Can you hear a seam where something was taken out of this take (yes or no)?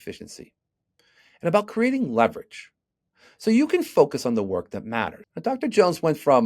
yes